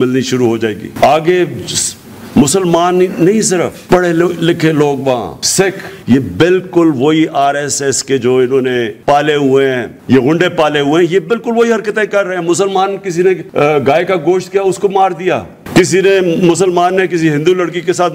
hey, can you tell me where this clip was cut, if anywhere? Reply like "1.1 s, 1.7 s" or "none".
5.9 s, 8.9 s, 9.9 s, 13.5 s